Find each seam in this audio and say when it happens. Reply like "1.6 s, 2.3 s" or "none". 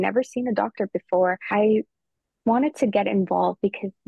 1.4 s